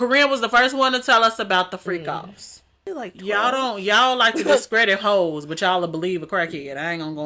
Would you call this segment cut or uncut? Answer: cut